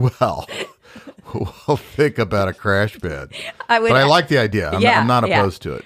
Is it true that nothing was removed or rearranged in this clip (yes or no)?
yes